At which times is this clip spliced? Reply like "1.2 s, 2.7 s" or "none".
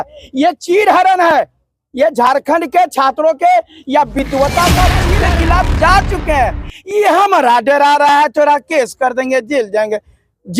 5.1 s